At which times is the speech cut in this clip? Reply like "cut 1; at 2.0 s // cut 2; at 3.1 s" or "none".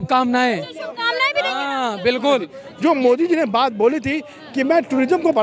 cut 1; at 2.6 s